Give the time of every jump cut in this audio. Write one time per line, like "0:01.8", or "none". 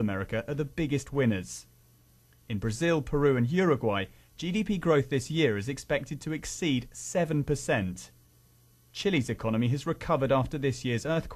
none